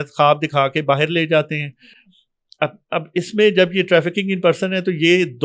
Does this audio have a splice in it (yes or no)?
no